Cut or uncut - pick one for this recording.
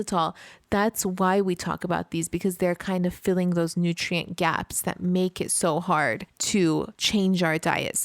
cut